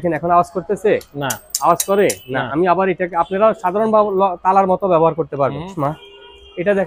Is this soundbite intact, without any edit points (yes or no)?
no